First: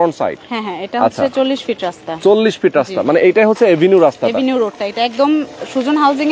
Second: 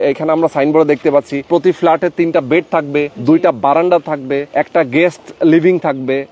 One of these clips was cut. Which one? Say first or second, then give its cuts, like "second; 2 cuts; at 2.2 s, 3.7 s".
second; 3 cuts; at 1.4 s, 3.1 s, 4.5 s